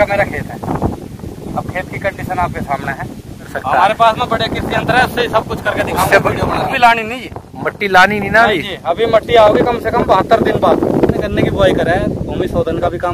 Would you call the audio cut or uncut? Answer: cut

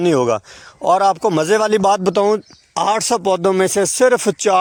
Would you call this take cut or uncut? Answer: uncut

